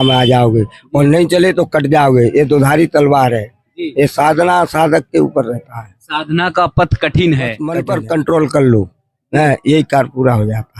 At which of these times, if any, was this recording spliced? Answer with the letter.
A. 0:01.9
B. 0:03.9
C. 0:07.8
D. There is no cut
C